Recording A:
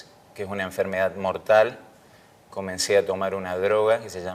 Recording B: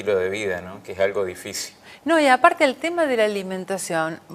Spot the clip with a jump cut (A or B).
A